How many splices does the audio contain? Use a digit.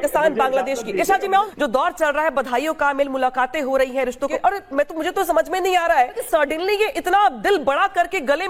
3